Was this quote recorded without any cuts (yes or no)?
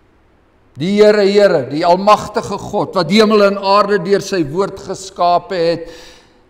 yes